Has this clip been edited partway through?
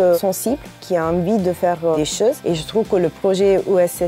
no; 0 cuts

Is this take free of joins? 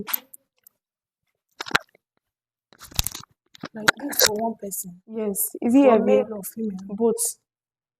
no; 1 cut; at 1.5 s

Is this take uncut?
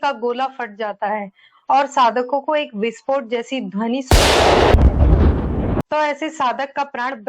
no; 1 cut; at 5.8 s

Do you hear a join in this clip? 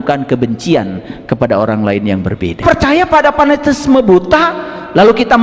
yes; 1 cut; at 2.6 s

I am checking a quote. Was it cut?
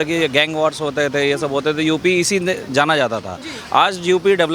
no; 0 cuts

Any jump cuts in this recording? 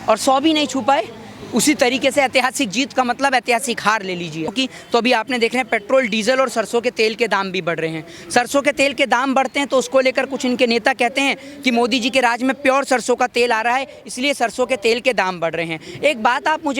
no; 0 cuts

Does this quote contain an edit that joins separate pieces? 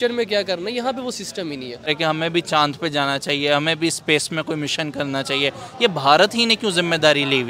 yes; 1 cut; at 1.9 s

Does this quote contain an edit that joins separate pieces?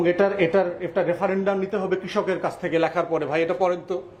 no; 0 cuts

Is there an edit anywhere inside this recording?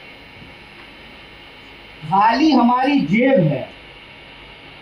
no; 0 cuts

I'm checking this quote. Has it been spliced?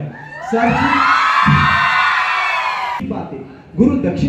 yes; 1 cut; at 3.0 s

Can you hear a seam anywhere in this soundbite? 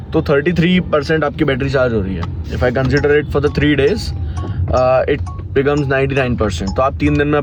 no; 0 cuts

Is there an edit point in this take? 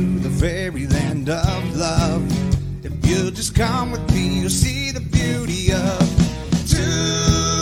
no; 0 cuts

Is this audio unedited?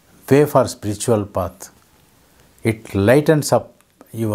yes; 0 cuts

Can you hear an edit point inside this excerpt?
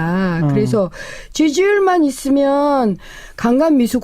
no; 0 cuts

